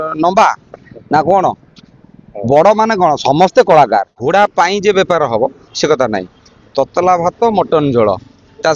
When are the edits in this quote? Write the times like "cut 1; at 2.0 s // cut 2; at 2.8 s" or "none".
cut 1; at 4.2 s